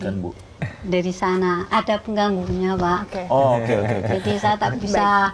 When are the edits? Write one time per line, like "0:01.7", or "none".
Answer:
none